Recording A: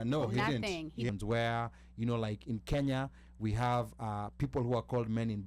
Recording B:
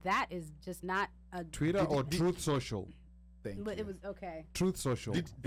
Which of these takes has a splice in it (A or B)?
A